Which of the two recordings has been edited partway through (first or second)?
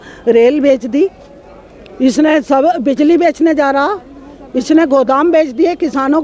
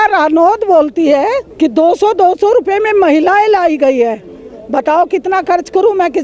second